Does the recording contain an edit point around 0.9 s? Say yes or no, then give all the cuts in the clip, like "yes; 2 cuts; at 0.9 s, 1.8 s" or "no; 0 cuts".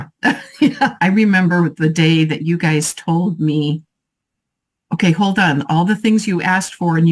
yes; 1 cut; at 0.9 s